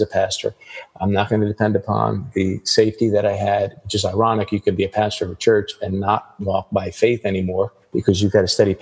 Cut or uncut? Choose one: cut